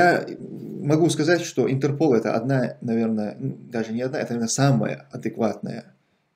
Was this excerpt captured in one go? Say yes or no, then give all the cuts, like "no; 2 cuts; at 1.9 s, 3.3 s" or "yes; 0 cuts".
yes; 0 cuts